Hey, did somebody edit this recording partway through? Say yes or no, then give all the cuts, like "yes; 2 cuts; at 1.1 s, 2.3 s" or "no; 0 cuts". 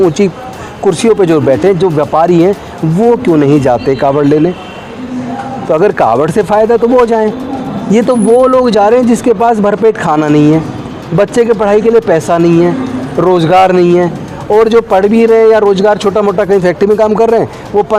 no; 0 cuts